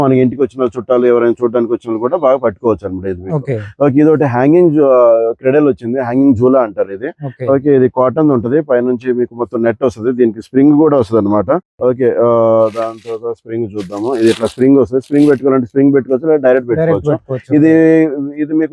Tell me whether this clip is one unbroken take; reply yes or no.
yes